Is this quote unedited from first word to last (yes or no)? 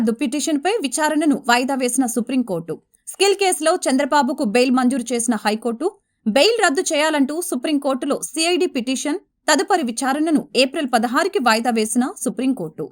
yes